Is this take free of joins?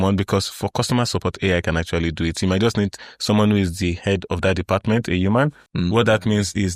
no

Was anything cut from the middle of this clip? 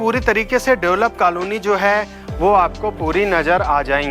no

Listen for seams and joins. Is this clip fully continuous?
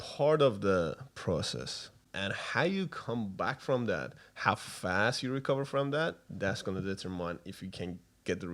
no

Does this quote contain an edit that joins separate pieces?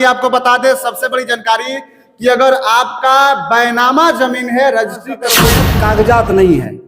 yes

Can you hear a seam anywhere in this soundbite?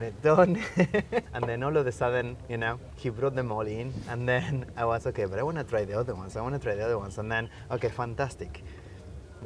yes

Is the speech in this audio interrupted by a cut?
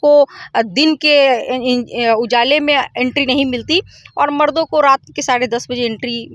no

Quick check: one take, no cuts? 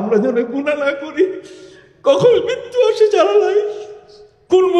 yes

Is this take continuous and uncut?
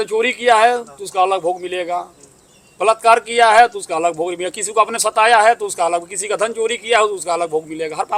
yes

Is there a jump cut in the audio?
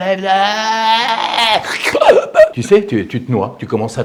no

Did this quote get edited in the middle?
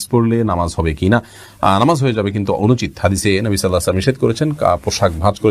no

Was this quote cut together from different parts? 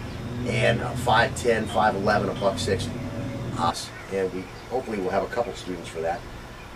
no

